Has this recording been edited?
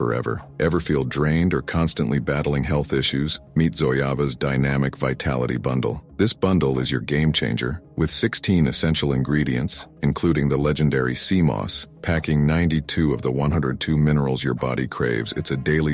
no; 0 cuts

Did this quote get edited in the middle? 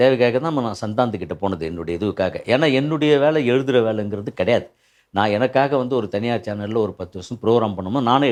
no; 0 cuts

